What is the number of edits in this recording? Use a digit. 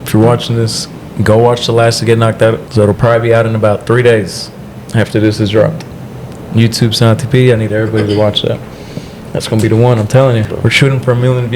2